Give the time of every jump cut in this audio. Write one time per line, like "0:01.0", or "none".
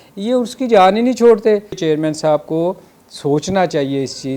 0:01.8